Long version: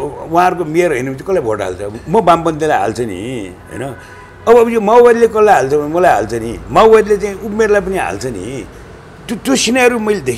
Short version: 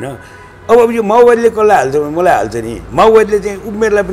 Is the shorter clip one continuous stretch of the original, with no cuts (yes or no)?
yes